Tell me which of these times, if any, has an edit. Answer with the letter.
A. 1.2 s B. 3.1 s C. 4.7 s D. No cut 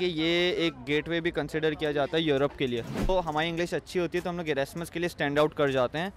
B